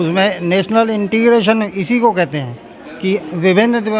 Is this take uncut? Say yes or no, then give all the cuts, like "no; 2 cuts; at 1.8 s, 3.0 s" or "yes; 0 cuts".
yes; 0 cuts